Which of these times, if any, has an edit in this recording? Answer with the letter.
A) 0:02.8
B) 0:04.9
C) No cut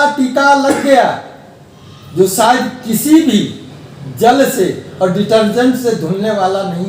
C